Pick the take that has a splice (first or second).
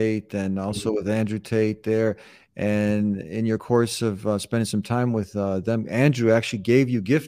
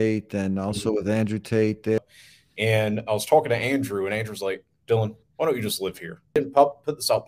second